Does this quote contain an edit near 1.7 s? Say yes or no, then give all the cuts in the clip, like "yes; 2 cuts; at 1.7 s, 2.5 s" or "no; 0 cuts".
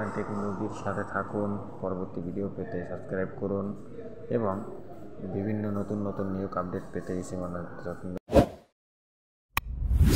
no; 1 cut; at 8.1 s